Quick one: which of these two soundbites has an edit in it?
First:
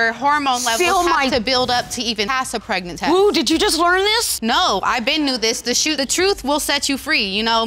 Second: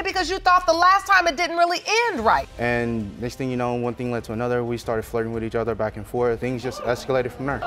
second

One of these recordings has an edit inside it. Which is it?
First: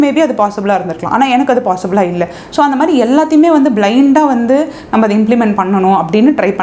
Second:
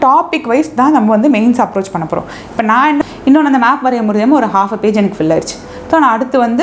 second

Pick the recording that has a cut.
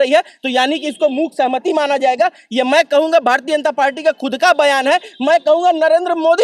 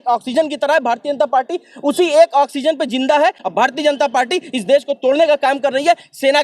second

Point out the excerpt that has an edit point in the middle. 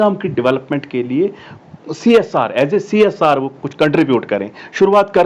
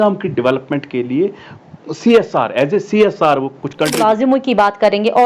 second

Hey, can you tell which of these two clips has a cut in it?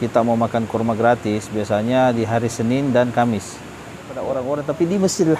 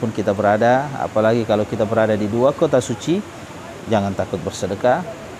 first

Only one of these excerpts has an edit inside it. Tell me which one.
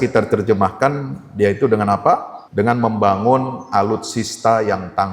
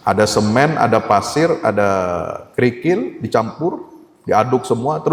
first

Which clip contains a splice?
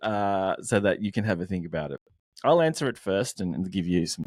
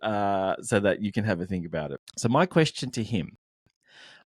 second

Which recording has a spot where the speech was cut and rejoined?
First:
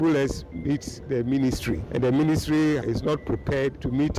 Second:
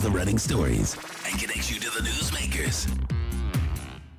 first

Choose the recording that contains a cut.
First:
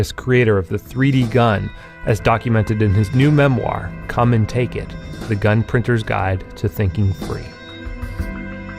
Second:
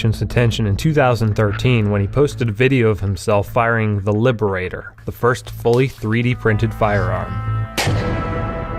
first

